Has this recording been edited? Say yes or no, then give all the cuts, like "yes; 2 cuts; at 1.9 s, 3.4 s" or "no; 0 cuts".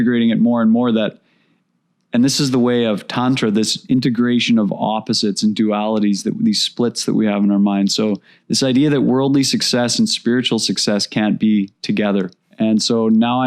yes; 2 cuts; at 3.8 s, 12.4 s